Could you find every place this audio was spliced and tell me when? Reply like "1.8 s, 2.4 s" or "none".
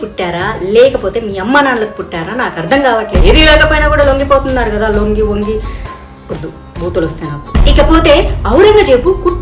3.2 s